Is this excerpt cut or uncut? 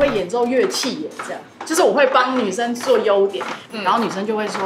uncut